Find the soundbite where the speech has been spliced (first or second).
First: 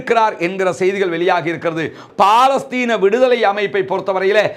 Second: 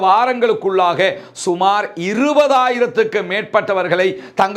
first